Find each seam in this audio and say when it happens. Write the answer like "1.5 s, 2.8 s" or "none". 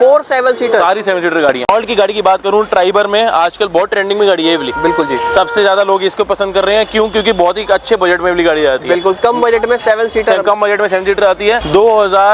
none